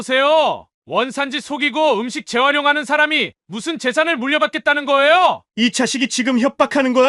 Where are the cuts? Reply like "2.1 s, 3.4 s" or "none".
5.4 s

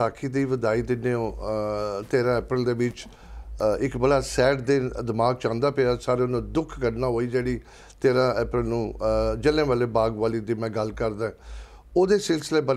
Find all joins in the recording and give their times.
none

